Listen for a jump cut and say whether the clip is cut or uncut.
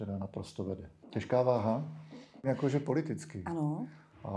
cut